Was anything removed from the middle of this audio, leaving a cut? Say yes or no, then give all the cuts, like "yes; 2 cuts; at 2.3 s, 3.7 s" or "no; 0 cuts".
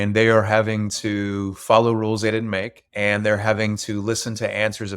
yes; 1 cut; at 2.8 s